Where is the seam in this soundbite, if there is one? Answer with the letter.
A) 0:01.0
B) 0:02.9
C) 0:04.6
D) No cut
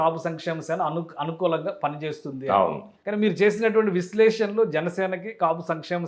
B